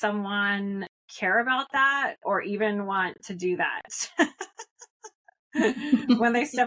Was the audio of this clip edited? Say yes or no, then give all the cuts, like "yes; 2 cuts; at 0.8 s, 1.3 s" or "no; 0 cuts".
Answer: yes; 1 cut; at 1.0 s